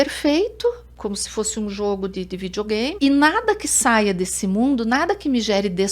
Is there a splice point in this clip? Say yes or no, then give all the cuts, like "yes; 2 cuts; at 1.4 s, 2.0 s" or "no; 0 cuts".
yes; 2 cuts; at 0.9 s, 2.9 s